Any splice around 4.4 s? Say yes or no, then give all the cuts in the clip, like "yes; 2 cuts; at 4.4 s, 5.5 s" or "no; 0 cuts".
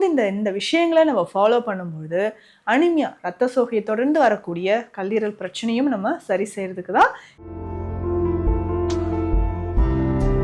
no; 1 cut; at 7.3 s